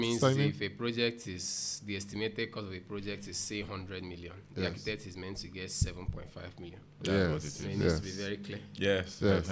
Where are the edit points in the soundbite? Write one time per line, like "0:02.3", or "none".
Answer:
none